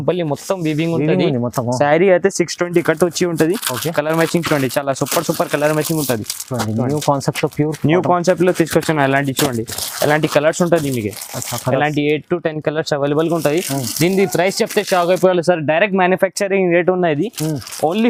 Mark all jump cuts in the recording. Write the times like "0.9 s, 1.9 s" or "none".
none